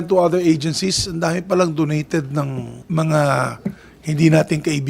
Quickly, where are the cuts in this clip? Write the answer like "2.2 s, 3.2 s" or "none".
2.7 s